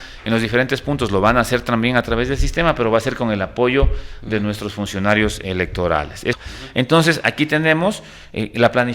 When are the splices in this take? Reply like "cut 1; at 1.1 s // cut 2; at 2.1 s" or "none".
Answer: cut 1; at 6.4 s